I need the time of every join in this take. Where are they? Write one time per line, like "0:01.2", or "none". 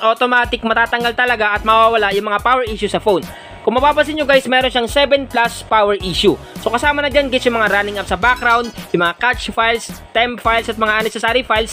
none